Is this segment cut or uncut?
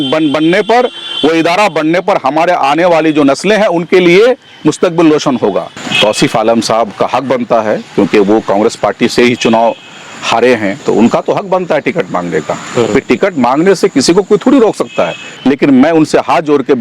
cut